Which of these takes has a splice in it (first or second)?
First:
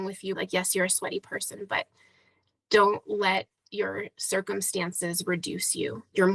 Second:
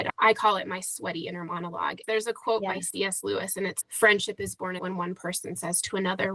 second